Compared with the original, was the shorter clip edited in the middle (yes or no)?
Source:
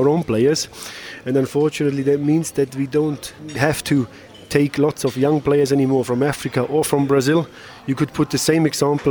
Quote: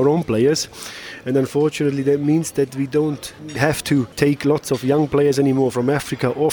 yes